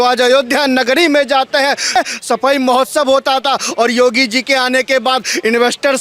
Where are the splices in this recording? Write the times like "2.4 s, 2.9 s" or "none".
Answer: 2.0 s